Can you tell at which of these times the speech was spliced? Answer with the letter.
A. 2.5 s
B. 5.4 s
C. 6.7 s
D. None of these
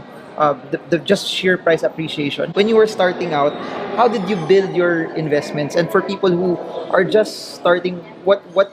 A